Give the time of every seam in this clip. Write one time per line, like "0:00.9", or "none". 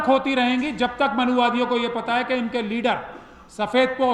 none